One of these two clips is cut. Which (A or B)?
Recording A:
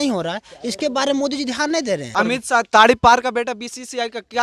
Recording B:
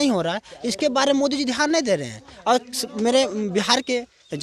A